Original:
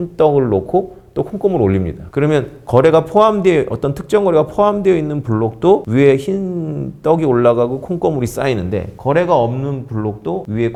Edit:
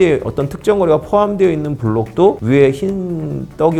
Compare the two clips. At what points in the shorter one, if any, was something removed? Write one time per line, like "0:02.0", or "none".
none